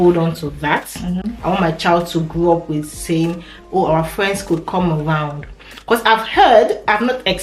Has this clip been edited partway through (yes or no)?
no